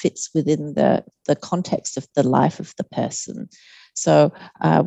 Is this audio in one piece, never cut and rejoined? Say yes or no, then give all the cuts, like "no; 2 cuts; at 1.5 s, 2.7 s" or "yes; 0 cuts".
yes; 0 cuts